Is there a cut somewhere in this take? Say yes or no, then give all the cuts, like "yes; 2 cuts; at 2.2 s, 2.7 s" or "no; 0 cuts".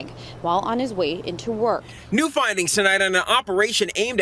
yes; 1 cut; at 1.9 s